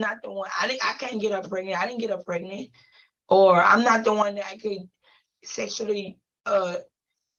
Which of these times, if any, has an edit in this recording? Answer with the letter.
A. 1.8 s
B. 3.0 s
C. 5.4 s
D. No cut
D